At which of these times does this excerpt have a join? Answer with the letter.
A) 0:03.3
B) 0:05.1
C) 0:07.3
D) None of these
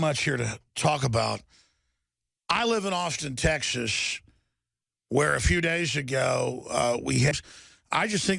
D